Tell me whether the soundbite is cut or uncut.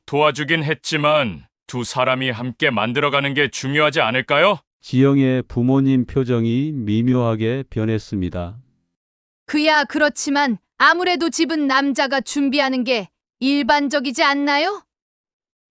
uncut